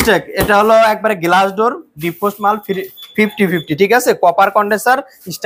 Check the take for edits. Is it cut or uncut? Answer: uncut